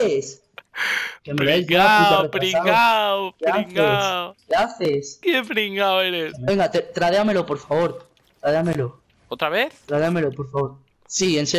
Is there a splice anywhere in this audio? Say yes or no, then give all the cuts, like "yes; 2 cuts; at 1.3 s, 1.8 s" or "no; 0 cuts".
yes; 1 cut; at 6.4 s